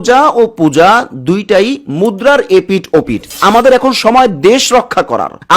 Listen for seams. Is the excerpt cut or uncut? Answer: cut